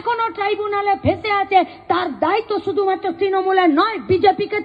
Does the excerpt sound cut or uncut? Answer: uncut